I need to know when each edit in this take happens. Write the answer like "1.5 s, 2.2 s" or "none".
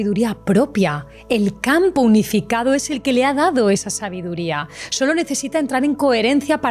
1.1 s